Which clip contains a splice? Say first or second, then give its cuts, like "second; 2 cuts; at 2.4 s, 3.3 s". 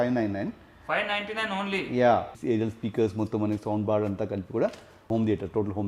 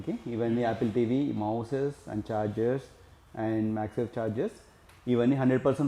first; 2 cuts; at 2.4 s, 4.9 s